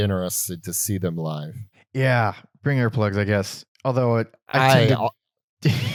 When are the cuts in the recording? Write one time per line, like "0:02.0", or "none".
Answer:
none